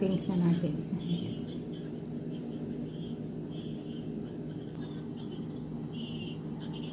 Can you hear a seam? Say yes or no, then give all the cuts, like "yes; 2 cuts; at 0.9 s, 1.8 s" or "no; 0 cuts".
yes; 1 cut; at 4.8 s